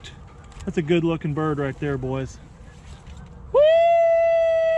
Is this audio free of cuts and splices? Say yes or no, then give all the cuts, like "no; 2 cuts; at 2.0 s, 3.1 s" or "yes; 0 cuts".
yes; 0 cuts